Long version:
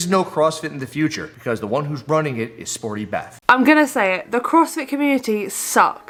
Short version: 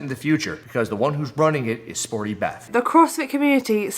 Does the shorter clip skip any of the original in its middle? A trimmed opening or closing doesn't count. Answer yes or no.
yes